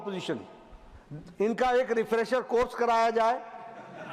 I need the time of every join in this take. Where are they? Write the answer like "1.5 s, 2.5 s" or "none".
none